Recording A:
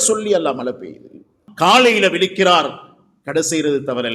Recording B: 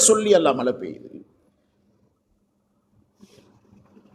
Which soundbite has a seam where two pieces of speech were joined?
A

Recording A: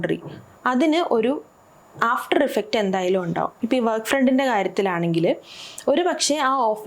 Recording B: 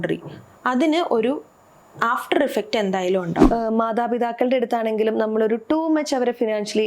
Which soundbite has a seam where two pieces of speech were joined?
B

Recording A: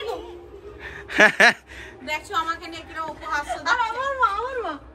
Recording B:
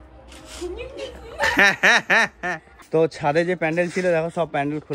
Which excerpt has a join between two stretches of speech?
B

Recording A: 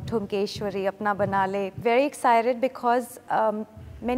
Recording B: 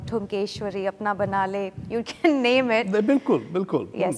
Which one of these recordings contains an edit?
A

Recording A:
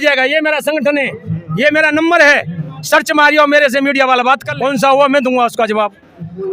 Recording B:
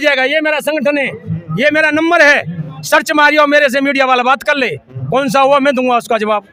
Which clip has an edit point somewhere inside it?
A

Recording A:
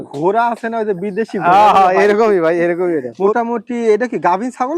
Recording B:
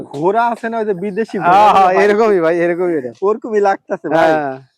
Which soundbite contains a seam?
A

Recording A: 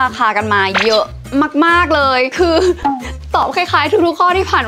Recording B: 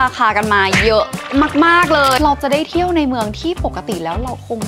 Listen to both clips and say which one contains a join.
B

